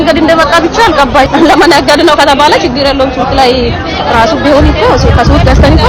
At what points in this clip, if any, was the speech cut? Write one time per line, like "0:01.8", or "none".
0:01.3